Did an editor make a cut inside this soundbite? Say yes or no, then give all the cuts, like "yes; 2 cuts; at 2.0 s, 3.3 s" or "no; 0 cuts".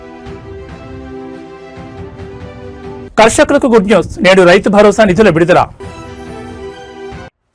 no; 0 cuts